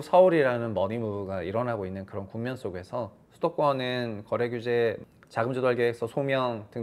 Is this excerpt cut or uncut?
uncut